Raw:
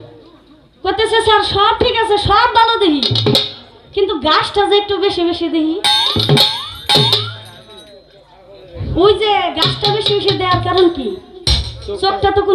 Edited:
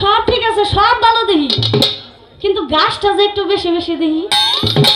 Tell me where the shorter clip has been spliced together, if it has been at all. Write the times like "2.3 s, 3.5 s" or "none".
none